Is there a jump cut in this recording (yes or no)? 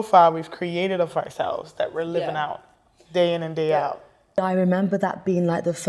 yes